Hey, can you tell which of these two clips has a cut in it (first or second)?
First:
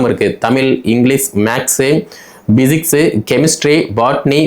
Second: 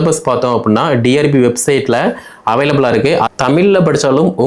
second